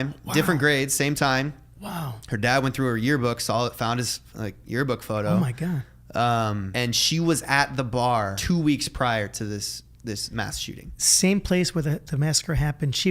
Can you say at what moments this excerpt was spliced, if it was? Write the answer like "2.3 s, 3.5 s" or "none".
6.7 s, 8.4 s